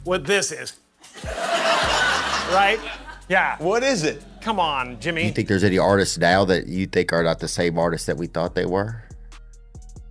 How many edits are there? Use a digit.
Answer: 1